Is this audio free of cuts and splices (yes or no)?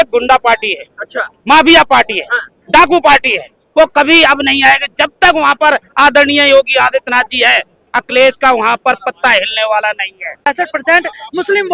no